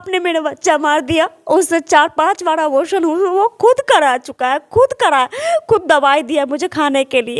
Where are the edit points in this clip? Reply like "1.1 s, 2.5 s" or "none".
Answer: none